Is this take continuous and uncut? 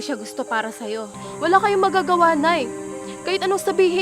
no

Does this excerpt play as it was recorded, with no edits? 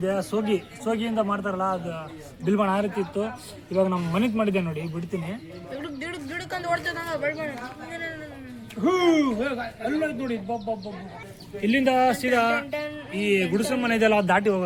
yes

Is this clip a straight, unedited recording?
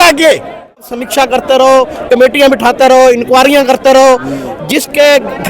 no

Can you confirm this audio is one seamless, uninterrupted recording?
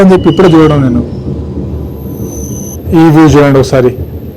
no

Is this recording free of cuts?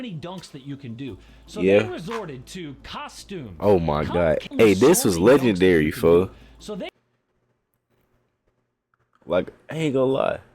no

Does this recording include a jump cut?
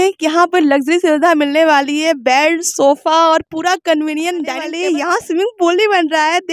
yes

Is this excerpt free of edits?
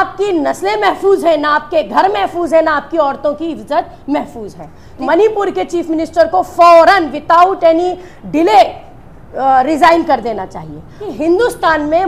no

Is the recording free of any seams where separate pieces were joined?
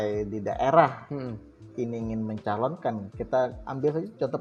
yes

